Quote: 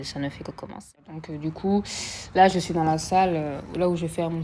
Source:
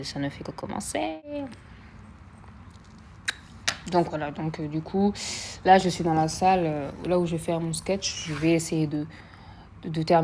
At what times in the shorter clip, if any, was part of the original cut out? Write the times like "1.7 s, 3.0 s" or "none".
0.9 s